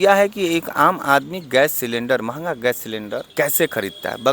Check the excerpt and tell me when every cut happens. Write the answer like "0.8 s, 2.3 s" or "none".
3.3 s

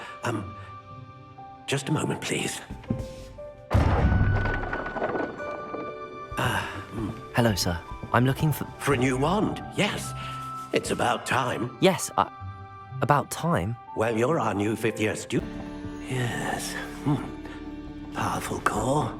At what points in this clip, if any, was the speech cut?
15.4 s

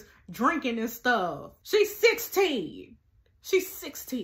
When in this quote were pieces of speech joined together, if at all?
1.5 s

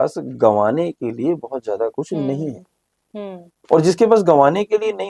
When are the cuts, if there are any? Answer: none

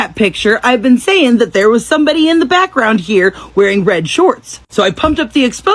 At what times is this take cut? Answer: none

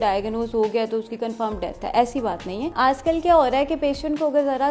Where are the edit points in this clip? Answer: 2.7 s

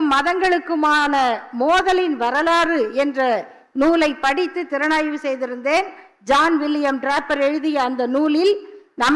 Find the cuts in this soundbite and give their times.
none

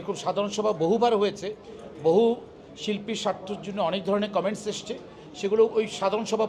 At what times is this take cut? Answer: none

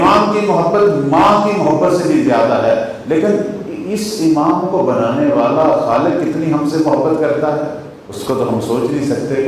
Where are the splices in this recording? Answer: none

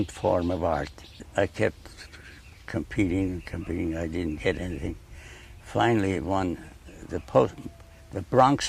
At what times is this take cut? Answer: 7.3 s

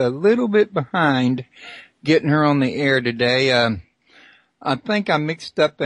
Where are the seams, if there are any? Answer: 4.5 s

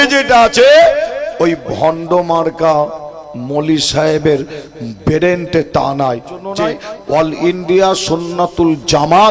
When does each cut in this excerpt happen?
6.5 s

